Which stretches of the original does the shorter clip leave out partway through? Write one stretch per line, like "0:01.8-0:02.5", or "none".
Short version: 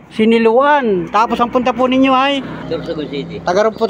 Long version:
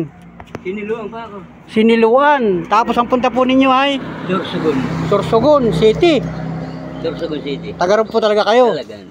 0:04.1-0:06.9